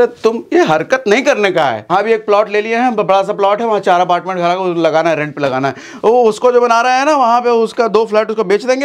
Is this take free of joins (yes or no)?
no